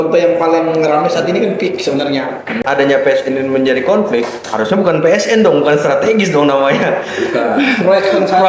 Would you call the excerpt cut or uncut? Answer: cut